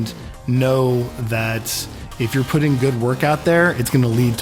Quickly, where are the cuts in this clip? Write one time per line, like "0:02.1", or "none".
none